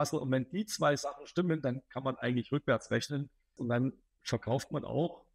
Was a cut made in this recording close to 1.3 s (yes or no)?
no